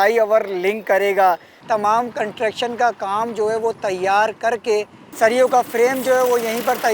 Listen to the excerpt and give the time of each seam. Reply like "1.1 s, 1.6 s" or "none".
1.5 s, 5.0 s